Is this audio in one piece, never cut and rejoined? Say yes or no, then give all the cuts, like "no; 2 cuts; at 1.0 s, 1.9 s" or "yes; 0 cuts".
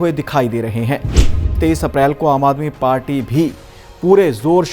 no; 1 cut; at 1.4 s